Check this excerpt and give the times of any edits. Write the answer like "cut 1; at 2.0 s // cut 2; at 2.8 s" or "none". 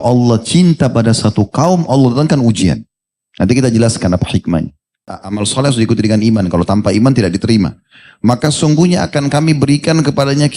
cut 1; at 5.2 s